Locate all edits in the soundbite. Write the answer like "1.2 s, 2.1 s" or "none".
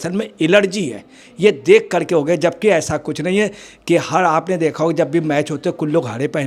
none